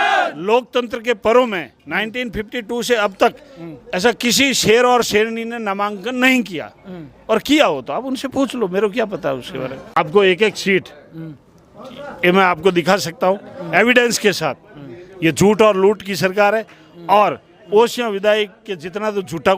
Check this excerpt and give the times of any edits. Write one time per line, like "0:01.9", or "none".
0:10.0